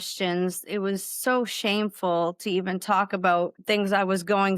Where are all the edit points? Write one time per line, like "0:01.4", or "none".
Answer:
0:03.6